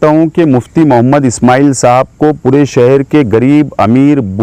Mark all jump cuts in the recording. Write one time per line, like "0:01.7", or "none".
none